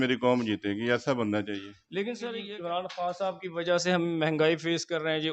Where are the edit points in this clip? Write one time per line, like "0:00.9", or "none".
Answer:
none